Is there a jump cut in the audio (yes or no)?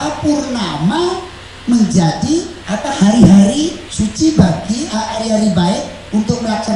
yes